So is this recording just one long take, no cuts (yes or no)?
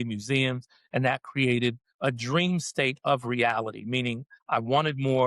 no